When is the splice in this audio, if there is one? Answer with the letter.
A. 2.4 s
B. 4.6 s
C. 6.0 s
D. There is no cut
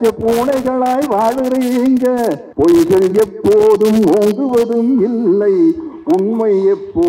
A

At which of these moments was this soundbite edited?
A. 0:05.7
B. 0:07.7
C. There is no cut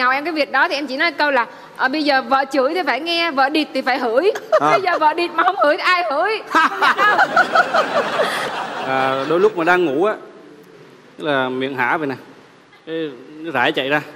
C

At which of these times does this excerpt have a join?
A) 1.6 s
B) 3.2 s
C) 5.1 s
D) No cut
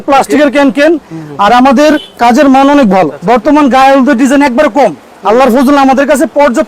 B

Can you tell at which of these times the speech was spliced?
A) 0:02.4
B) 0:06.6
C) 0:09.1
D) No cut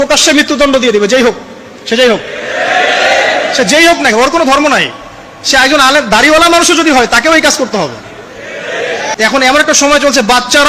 C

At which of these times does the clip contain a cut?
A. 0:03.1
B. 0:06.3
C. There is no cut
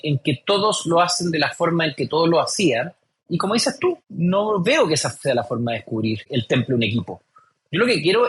B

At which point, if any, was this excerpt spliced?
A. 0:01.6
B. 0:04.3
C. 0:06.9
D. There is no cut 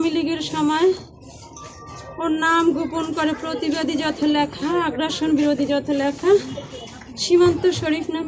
D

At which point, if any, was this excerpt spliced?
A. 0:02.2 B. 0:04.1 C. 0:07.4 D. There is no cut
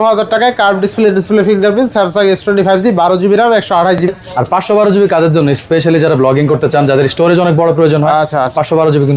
B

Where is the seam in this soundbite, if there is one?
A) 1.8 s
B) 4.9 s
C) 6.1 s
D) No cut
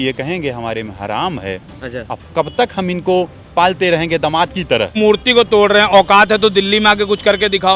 B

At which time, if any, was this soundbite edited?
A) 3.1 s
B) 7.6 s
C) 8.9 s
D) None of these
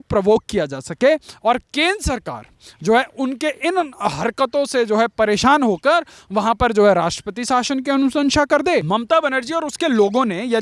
C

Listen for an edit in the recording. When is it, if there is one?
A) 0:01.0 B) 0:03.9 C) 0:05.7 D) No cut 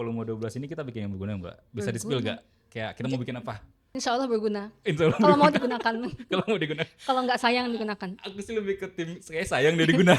B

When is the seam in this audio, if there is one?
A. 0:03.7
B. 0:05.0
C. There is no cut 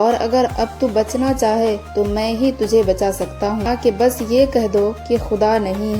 A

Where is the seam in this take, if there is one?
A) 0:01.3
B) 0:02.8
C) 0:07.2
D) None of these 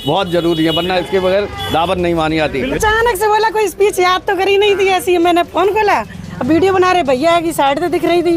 B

